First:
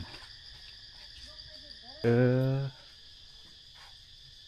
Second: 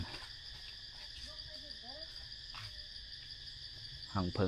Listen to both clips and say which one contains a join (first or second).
first